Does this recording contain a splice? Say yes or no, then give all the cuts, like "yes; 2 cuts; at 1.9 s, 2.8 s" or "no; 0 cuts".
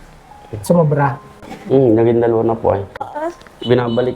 yes; 1 cut; at 3.0 s